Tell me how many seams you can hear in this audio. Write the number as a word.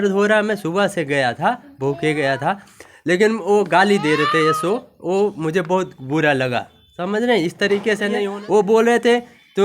one